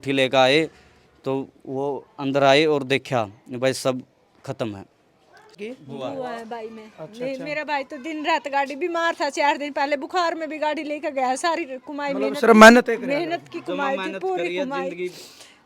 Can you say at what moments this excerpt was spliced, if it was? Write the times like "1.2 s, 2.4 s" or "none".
5.6 s